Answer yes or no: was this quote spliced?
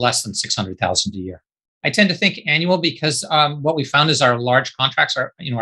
yes